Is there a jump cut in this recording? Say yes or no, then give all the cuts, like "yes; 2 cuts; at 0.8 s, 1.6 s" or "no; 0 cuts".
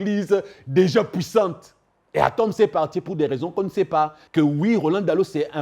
yes; 1 cut; at 4.2 s